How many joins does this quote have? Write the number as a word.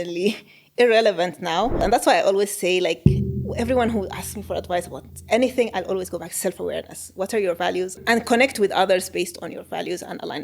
two